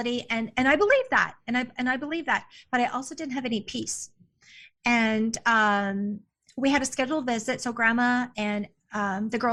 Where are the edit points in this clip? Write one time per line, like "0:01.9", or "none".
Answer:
none